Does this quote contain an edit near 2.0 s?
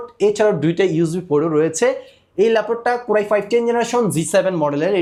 no; 0 cuts

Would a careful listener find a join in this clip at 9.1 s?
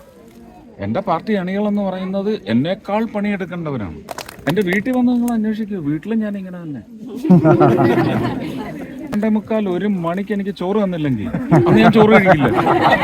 yes; 2 cuts; at 4.5 s, 9.1 s

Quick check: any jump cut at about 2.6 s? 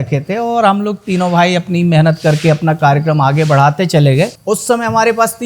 no; 1 cut; at 4.4 s

